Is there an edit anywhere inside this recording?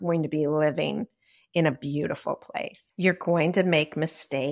yes; 1 cut; at 2.8 s

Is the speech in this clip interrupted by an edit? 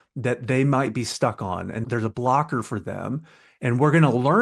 yes; 1 cut; at 1.8 s

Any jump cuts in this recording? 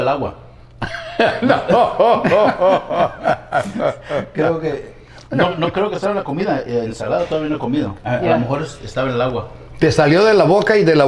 yes; 1 cut; at 8.0 s

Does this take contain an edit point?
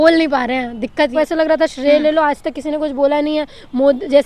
yes; 1 cut; at 1.1 s

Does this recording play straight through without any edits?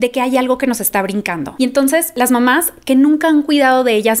no; 1 cut; at 1.9 s

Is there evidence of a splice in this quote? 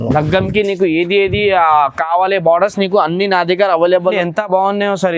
yes; 1 cut; at 4.2 s

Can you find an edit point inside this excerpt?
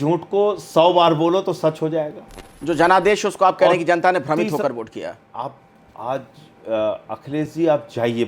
yes; 1 cut; at 2.5 s

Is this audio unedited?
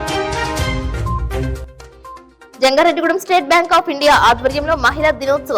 no; 1 cut; at 1.6 s

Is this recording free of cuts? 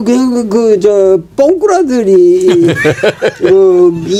yes; 0 cuts

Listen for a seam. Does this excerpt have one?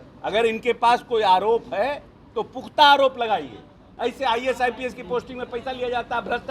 yes; 1 cut; at 3.8 s

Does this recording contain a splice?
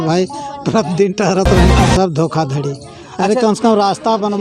yes; 1 cut; at 1.8 s

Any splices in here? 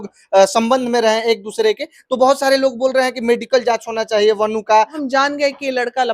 yes; 1 cut; at 5.0 s

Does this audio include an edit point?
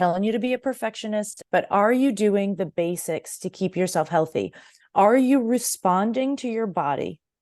yes; 1 cut; at 1.4 s

